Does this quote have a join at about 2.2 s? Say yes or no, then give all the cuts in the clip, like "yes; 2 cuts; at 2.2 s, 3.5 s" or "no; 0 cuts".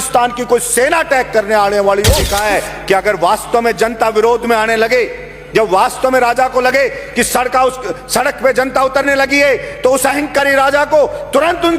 yes; 1 cut; at 2.2 s